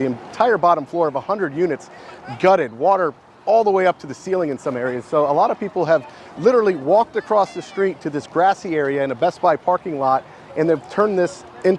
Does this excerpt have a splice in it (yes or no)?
no